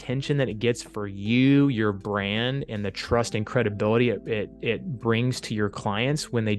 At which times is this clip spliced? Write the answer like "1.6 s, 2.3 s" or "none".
none